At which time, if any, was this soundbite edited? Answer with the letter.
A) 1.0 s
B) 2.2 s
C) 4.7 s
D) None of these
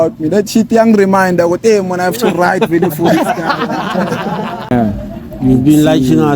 C